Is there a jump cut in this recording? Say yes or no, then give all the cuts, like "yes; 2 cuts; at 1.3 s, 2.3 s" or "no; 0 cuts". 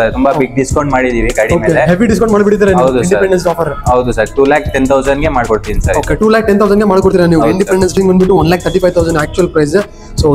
yes; 1 cut; at 7.9 s